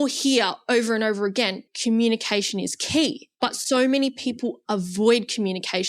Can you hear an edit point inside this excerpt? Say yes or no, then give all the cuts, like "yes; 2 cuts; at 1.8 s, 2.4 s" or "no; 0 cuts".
yes; 2 cuts; at 1.7 s, 3.2 s